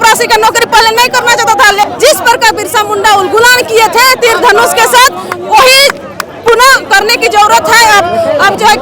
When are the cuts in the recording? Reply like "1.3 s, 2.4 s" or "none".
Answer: 1.9 s